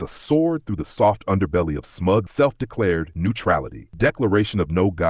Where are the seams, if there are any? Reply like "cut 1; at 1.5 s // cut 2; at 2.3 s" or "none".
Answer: cut 1; at 2.3 s